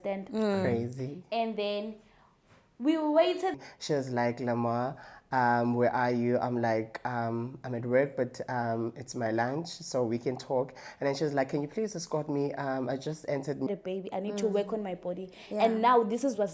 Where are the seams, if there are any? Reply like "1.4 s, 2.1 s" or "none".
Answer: 3.6 s, 13.7 s